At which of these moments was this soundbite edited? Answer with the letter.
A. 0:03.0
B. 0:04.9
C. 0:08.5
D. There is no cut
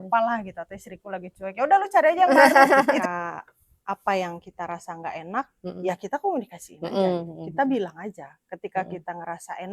A